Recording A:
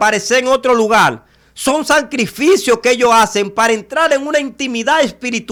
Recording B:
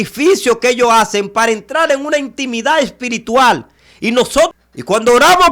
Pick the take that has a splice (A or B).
B